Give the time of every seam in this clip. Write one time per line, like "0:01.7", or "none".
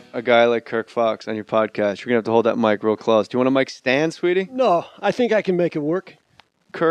0:03.9